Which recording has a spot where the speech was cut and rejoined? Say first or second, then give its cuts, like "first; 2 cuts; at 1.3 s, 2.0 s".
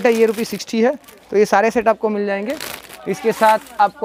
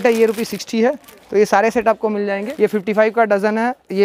second; 1 cut; at 2.5 s